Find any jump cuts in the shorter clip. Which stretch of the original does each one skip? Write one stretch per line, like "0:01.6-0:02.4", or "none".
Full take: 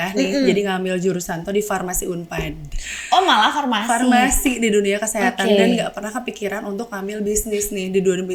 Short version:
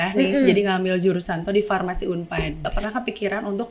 0:02.8-0:06.0